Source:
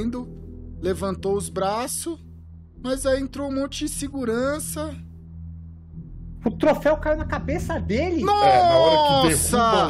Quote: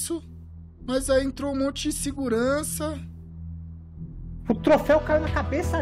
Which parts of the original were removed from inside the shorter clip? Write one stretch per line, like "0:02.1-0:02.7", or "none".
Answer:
none